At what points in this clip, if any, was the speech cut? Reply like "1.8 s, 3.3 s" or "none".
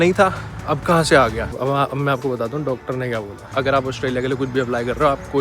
1.5 s, 3.4 s